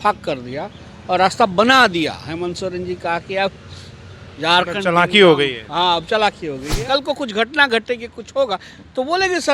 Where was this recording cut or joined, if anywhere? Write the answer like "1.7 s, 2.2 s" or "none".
6.8 s